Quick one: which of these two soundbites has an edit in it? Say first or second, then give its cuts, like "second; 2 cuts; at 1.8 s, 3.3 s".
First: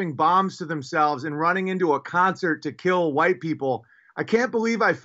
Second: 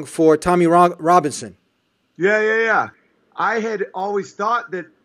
second; 1 cut; at 3.0 s